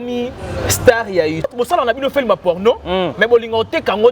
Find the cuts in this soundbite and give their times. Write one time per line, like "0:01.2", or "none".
0:01.5